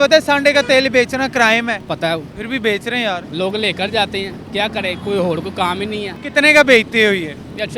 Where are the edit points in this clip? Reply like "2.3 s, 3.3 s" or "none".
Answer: 2.0 s, 3.3 s, 6.1 s